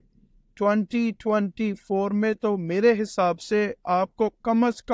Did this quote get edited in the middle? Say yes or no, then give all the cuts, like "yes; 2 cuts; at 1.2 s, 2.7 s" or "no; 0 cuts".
no; 0 cuts